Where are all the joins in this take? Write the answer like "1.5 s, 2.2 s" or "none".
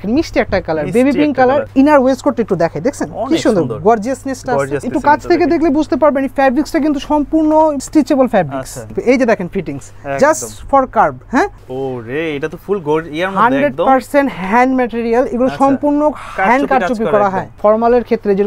1.7 s, 4.8 s, 7.8 s, 8.9 s, 11.6 s, 17.5 s